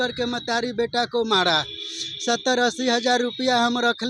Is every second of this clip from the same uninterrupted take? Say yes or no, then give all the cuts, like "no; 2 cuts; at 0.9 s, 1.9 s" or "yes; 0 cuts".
yes; 0 cuts